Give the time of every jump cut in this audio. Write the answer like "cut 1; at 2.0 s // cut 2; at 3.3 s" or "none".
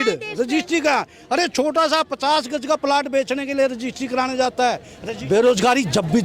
cut 1; at 4.9 s